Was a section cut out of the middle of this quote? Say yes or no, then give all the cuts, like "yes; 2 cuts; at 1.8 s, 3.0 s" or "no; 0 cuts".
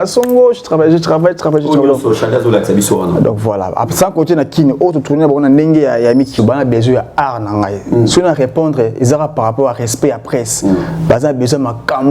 yes; 1 cut; at 6.3 s